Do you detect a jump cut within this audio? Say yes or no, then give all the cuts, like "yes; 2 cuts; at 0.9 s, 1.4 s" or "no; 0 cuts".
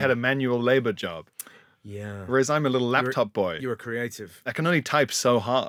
no; 0 cuts